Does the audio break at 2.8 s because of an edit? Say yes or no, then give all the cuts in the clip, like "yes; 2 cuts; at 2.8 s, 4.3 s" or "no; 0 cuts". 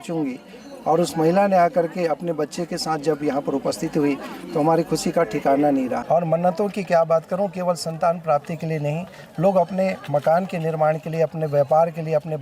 no; 1 cut; at 6.0 s